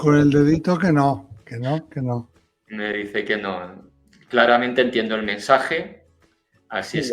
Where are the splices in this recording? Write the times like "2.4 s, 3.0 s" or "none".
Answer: none